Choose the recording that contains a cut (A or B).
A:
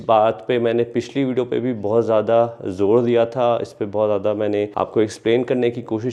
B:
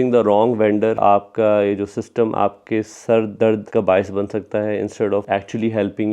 B